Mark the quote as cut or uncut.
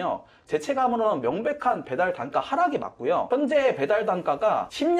cut